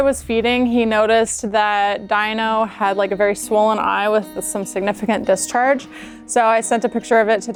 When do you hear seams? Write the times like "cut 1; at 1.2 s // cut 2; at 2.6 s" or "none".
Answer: none